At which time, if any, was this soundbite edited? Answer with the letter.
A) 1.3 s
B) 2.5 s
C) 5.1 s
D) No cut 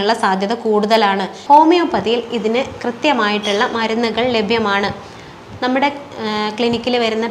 A